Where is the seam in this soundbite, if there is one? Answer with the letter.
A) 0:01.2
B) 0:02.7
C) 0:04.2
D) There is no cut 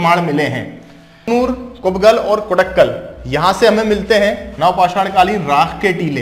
A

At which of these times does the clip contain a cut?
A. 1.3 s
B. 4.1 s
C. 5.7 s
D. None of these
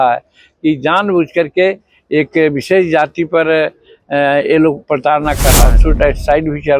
C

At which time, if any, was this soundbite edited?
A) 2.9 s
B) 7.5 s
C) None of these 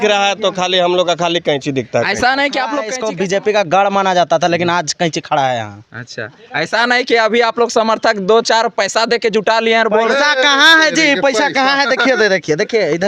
A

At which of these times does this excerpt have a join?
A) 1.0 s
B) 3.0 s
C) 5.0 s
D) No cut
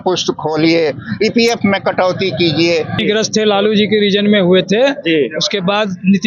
B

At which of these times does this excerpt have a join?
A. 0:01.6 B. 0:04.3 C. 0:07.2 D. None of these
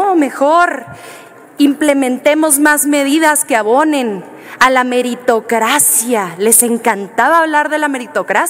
D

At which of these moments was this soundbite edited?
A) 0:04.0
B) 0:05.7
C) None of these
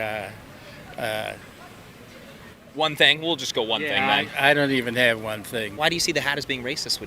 B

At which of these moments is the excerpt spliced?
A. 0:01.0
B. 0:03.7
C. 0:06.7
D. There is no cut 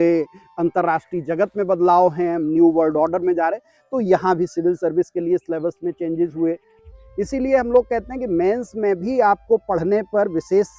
C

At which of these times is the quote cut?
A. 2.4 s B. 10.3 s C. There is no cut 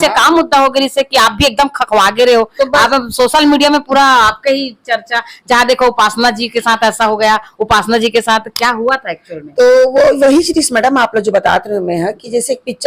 C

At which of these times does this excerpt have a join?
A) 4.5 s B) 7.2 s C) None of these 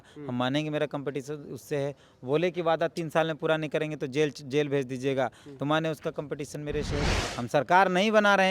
B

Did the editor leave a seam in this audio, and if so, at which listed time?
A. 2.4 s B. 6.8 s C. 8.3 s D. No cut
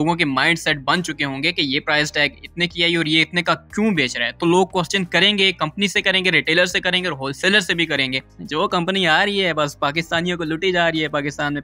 C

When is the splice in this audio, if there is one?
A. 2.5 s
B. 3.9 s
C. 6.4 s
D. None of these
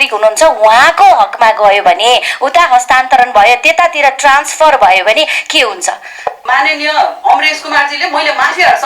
C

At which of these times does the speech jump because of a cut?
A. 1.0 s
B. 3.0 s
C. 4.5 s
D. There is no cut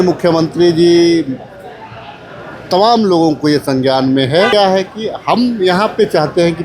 C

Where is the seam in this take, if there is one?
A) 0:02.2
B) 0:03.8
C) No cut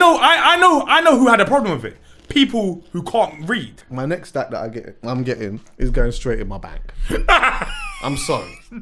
B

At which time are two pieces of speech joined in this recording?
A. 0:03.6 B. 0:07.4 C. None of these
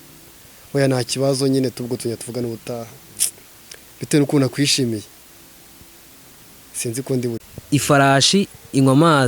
B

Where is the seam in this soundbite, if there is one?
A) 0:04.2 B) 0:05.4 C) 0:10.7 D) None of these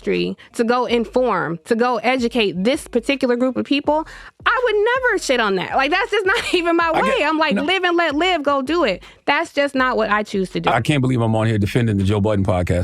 C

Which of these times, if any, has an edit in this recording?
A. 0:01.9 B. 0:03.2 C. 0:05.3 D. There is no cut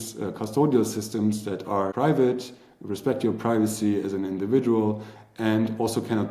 A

